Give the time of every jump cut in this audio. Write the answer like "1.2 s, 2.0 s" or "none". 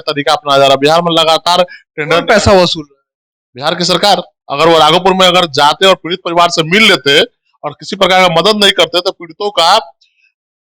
4.4 s